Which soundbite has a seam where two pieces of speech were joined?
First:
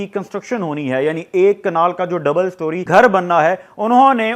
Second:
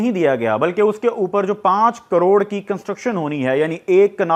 first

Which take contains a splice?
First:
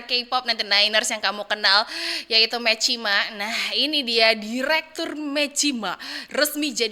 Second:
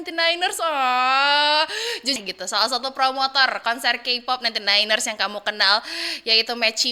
second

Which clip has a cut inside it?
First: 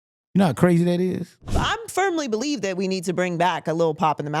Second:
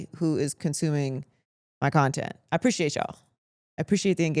first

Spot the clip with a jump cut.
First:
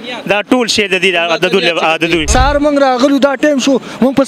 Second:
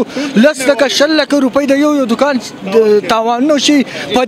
first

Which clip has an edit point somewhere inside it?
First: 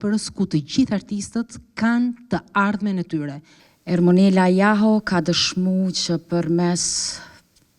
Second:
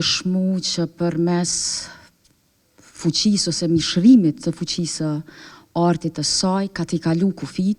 first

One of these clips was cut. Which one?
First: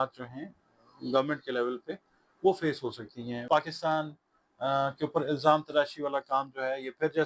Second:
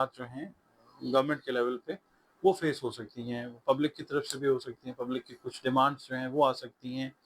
first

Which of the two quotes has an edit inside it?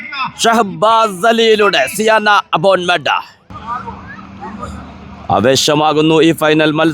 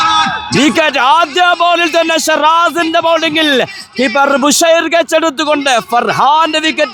first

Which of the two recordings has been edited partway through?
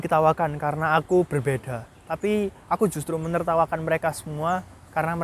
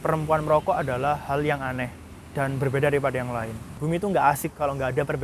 second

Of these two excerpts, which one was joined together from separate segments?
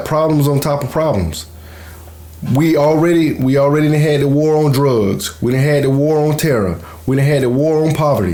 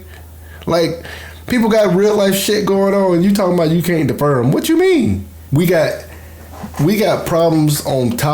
second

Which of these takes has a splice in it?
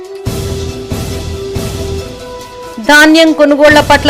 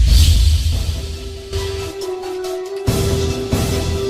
first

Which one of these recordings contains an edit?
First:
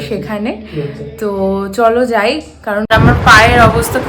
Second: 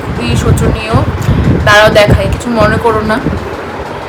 first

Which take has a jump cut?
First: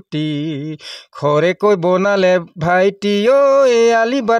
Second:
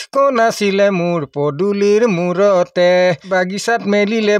second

